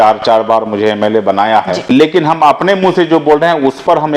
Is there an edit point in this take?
yes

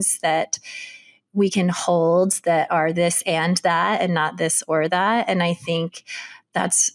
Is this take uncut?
yes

